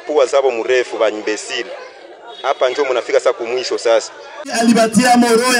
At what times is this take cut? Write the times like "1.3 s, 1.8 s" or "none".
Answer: 4.3 s